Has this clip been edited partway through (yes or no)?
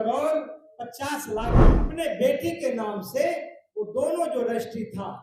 yes